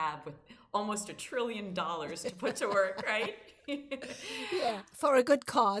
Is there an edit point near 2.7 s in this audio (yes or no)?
no